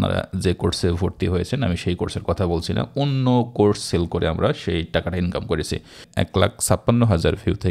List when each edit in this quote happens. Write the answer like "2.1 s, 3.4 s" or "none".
6.1 s